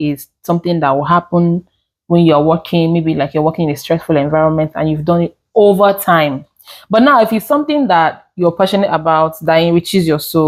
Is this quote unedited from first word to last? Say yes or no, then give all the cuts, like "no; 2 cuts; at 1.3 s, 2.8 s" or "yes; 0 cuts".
yes; 0 cuts